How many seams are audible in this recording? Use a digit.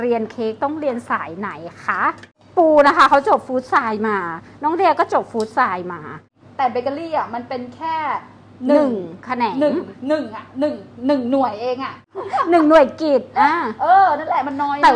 0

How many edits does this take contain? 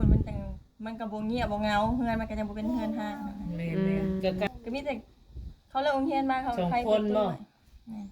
1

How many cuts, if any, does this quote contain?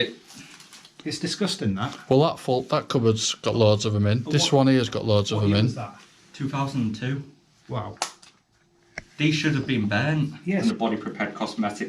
1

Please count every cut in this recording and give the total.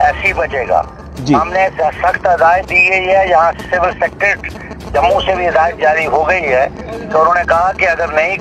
0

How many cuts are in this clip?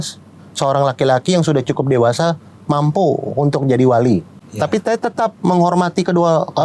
1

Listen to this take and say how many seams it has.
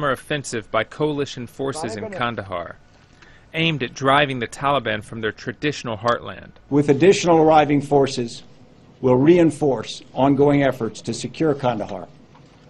1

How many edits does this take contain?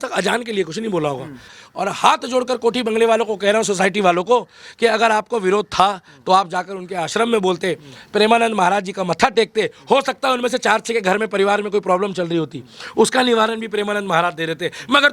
1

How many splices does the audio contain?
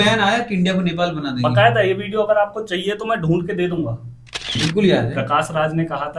1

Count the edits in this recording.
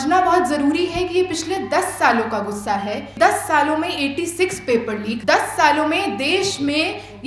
2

